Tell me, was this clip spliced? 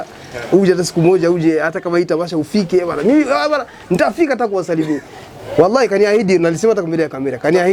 no; 0 cuts

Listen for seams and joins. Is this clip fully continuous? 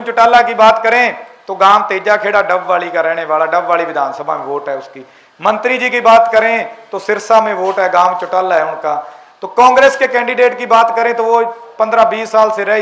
yes; 0 cuts

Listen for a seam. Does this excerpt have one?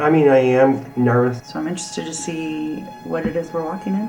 yes; 1 cut; at 1.4 s

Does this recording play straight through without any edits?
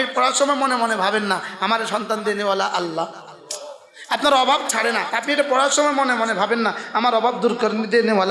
yes; 0 cuts

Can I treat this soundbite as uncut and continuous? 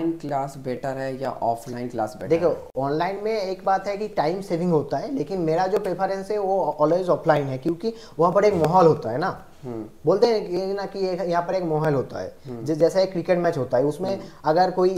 yes; 0 cuts

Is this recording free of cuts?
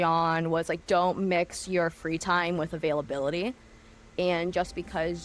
yes; 0 cuts

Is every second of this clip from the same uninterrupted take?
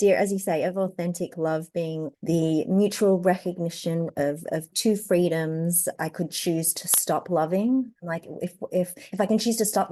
no; 3 cuts; at 2.1 s, 6.0 s, 8.0 s

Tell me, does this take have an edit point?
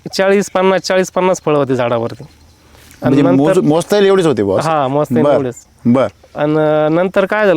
no; 0 cuts

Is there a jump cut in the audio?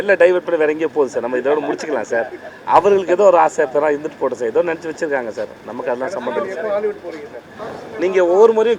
yes; 1 cut; at 7.4 s

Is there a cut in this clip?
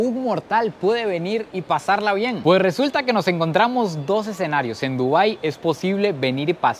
no; 0 cuts

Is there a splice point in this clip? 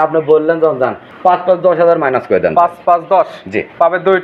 yes; 1 cut; at 1.0 s

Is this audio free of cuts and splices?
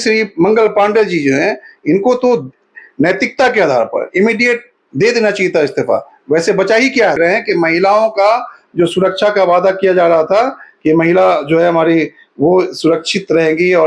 no; 1 cut; at 7.2 s

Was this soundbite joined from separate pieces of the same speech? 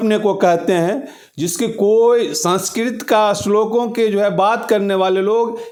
no; 0 cuts

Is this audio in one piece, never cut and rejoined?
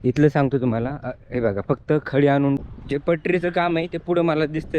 no; 1 cut; at 2.6 s

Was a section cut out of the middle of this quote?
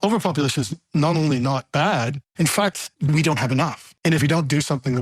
yes; 2 cuts; at 2.5 s, 4.2 s

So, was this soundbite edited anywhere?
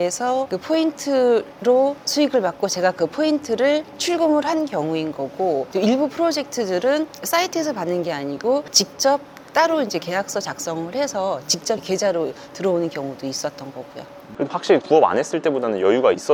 no; 0 cuts

